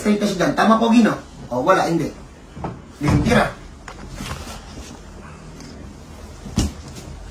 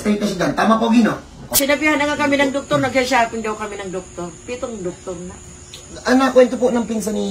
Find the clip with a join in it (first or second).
second